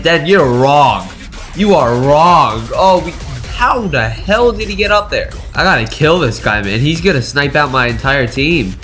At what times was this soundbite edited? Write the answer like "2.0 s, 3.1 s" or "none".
5.4 s